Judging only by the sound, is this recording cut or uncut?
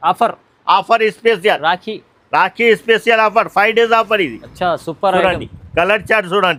uncut